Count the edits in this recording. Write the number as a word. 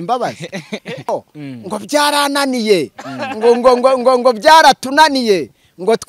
one